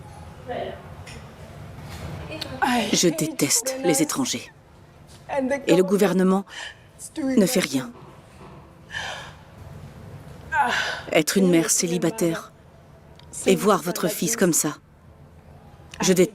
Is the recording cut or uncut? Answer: cut